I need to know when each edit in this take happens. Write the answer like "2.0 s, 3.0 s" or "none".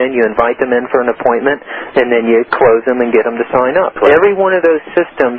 2.5 s, 3.9 s